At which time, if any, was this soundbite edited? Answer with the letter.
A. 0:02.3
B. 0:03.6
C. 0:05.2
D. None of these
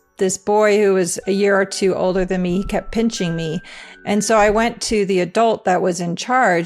D